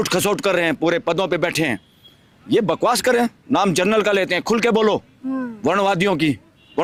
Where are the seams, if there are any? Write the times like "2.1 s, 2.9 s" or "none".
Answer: none